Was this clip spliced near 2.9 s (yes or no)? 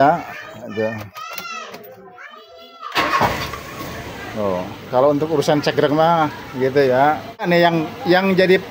no